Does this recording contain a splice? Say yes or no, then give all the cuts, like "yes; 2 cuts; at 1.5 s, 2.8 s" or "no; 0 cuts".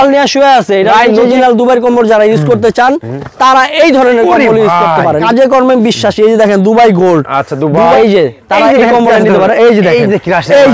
yes; 3 cuts; at 1.4 s, 5.2 s, 7.9 s